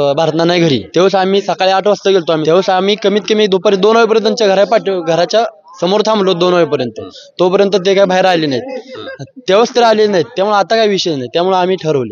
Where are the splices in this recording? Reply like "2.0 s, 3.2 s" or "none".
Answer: 0.9 s, 2.4 s